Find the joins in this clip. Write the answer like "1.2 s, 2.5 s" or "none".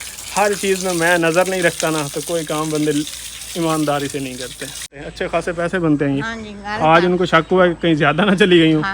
4.9 s

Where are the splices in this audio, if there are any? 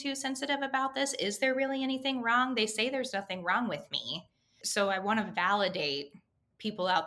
none

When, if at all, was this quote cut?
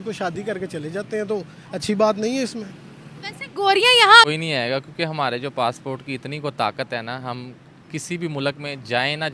4.3 s

